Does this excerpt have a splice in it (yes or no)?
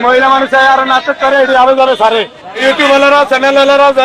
no